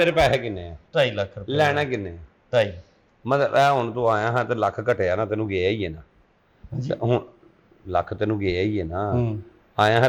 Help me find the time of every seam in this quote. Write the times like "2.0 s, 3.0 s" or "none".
none